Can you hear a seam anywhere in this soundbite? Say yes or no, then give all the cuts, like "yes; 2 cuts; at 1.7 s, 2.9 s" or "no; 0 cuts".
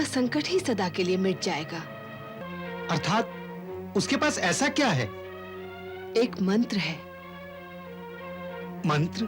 yes; 1 cut; at 2.4 s